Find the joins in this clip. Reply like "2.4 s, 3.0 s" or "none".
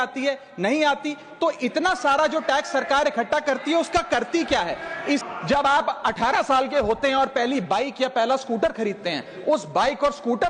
5.2 s